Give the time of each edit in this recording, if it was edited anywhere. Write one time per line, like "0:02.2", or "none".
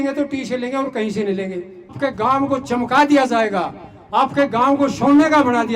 0:02.0